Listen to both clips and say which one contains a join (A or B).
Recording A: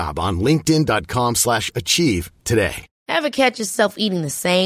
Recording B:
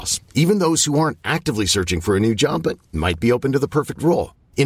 A